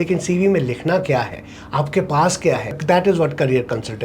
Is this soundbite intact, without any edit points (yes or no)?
no